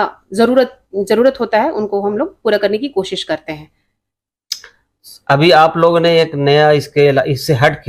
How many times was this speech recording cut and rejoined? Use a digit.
0